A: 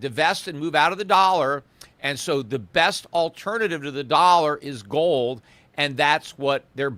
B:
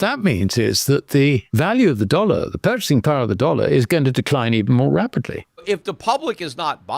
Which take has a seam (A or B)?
B